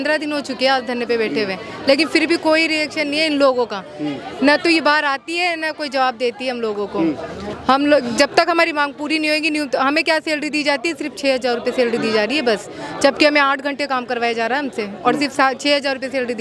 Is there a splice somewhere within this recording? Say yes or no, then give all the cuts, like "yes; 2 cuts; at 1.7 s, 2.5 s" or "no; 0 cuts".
no; 0 cuts